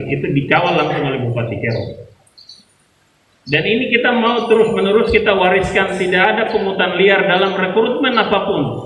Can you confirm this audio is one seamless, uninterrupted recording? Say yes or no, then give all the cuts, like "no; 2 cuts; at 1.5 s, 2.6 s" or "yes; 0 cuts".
yes; 0 cuts